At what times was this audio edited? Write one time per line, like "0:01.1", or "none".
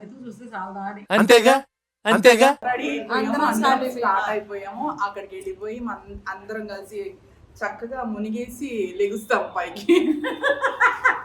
0:02.6